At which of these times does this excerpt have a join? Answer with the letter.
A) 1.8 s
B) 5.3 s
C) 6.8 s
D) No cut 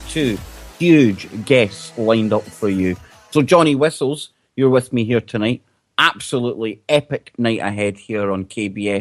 A